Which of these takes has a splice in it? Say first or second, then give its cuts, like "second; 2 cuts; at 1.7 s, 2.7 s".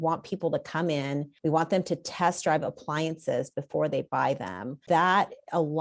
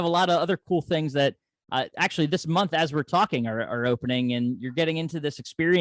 first; 2 cuts; at 1.3 s, 4.8 s